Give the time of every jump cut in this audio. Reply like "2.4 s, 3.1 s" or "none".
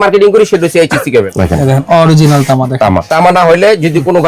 1.3 s, 3.1 s